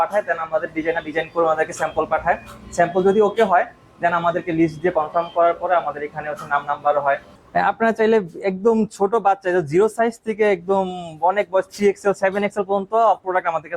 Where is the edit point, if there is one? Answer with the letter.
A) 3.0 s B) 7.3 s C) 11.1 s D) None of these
B